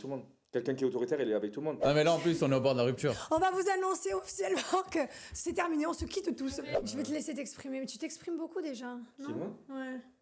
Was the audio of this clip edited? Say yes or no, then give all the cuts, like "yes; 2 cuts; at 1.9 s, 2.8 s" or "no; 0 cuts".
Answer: yes; 3 cuts; at 1.8 s, 3.2 s, 6.4 s